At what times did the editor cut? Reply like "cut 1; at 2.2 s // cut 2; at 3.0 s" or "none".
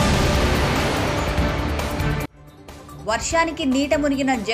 cut 1; at 2.2 s